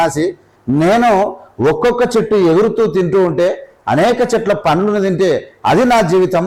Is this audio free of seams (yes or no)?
yes